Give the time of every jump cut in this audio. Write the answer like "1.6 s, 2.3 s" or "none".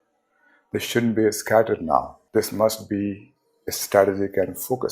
2.2 s